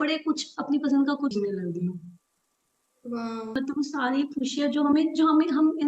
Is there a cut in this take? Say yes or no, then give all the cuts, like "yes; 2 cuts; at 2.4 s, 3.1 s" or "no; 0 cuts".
yes; 2 cuts; at 1.3 s, 3.6 s